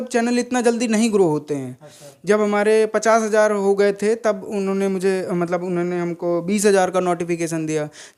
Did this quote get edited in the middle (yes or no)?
no